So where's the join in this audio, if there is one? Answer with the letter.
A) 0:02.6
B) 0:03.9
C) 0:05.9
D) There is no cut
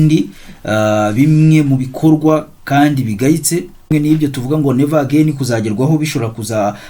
B